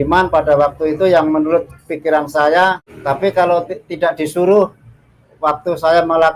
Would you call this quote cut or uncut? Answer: cut